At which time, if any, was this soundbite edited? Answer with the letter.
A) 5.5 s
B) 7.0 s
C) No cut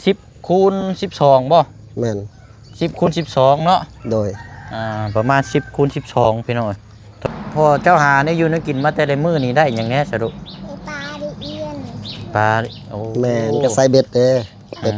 B